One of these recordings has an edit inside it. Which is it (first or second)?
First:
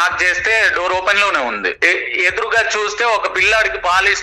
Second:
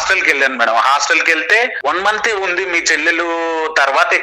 second